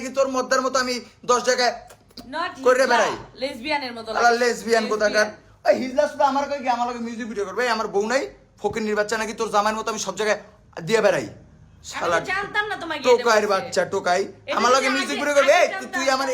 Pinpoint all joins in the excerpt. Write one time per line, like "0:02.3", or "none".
none